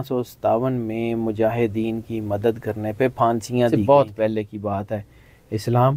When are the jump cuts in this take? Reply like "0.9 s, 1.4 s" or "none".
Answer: 3.8 s